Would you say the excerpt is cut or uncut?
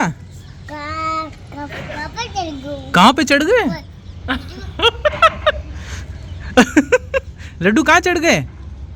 uncut